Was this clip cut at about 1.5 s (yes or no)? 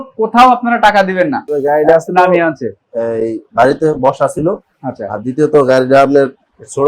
yes